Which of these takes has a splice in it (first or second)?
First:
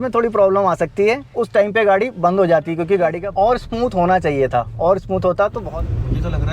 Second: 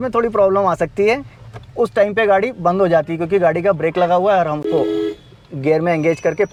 first